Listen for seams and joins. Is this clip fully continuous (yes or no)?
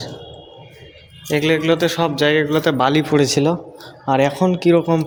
yes